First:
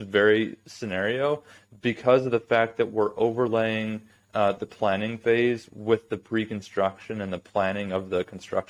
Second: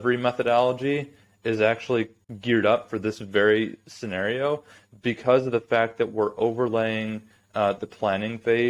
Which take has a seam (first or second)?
second